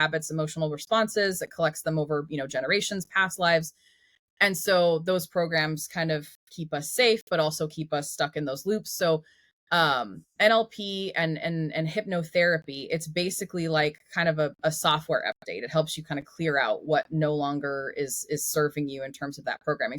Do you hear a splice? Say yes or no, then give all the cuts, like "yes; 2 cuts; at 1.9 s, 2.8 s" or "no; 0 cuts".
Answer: no; 0 cuts